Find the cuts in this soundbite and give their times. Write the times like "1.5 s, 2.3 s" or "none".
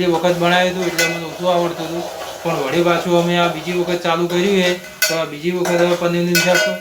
none

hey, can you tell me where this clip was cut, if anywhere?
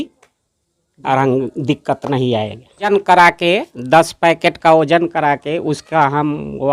2.9 s

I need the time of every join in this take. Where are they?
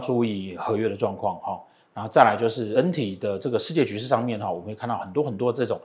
none

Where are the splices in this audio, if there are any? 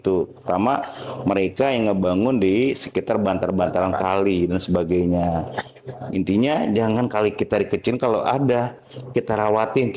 none

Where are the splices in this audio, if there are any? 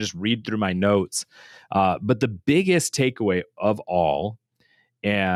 none

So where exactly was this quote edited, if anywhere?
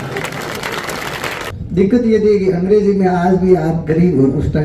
1.5 s

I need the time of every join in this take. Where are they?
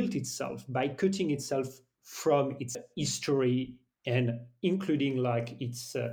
2.8 s

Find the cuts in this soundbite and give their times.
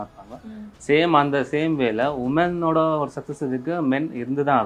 none

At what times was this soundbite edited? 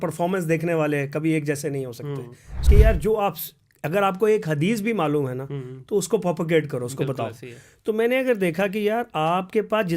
2.5 s

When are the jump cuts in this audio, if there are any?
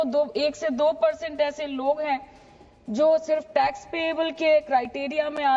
none

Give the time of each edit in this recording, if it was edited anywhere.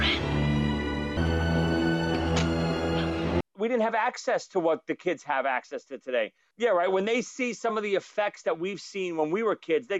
1.2 s, 3.4 s, 6.4 s

